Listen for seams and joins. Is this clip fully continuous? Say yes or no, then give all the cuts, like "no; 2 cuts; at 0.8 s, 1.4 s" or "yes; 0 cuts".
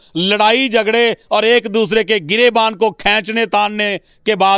yes; 0 cuts